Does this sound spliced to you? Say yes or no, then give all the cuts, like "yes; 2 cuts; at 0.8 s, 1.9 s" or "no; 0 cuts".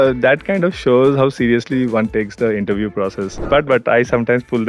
yes; 1 cut; at 3.4 s